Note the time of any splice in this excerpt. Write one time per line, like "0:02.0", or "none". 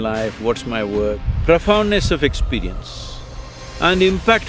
0:01.2

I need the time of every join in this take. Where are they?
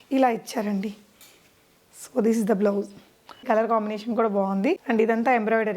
0:03.4
0:04.8

